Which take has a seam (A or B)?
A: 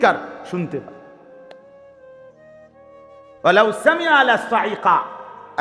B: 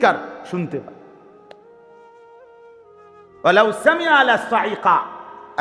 A